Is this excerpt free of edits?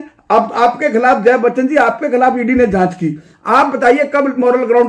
yes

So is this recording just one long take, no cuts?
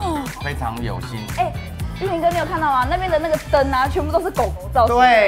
yes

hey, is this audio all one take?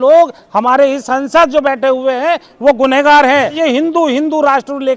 no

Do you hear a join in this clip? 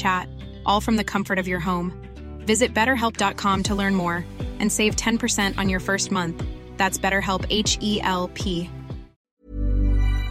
yes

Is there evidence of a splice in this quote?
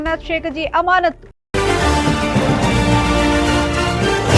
yes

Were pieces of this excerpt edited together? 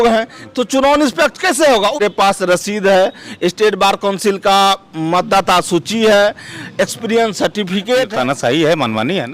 yes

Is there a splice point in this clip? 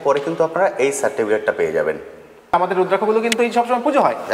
yes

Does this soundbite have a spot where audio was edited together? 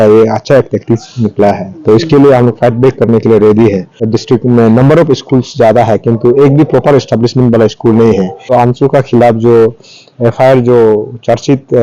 yes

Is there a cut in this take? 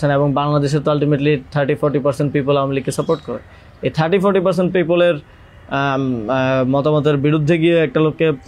no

